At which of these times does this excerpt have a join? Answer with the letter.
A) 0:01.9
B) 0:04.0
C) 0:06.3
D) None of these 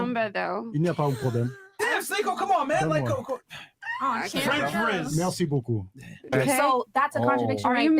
C